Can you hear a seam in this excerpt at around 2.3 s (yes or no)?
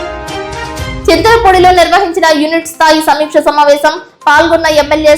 no